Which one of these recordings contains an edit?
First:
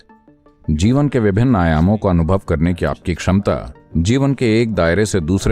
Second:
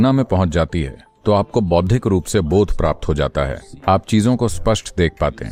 first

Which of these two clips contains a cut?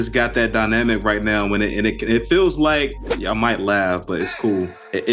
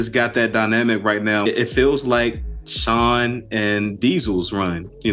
second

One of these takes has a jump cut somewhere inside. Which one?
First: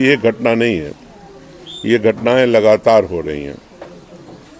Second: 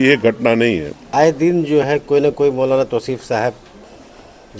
second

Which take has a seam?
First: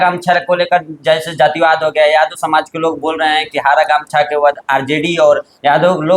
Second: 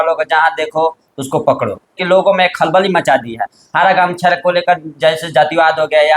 second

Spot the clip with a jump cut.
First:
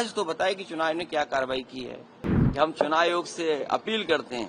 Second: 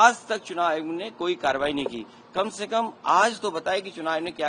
first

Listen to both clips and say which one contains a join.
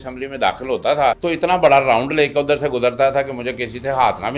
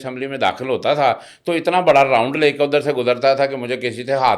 first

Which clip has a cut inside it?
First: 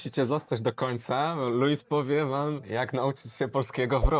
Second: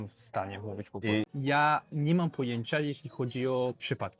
second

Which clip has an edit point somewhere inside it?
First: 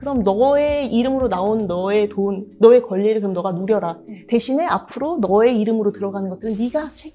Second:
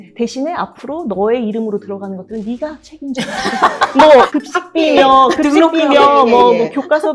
second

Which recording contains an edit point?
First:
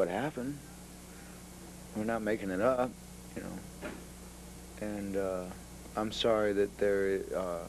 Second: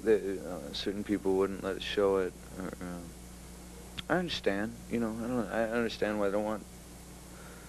second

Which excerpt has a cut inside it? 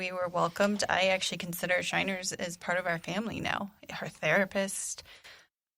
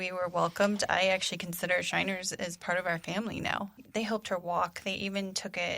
second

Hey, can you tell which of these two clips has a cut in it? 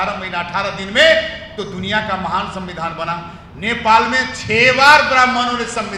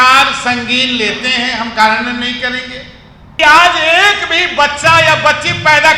second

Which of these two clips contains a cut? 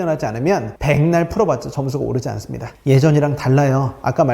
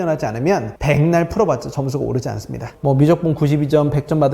second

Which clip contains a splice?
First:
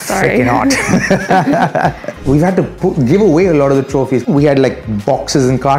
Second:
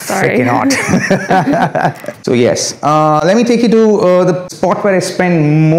first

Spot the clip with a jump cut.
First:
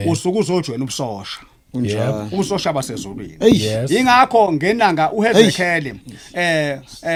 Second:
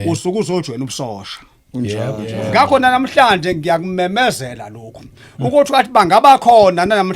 second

